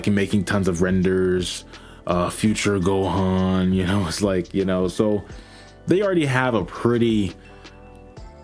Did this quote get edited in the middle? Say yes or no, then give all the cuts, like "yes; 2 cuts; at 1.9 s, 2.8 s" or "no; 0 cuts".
no; 0 cuts